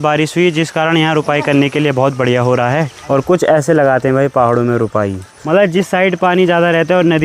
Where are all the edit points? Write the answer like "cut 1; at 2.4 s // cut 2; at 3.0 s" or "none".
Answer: cut 1; at 3.0 s // cut 2; at 5.3 s